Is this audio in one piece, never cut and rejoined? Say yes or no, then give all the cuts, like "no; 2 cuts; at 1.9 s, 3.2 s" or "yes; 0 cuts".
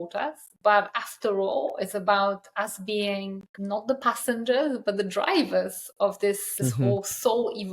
no; 2 cuts; at 3.5 s, 6.5 s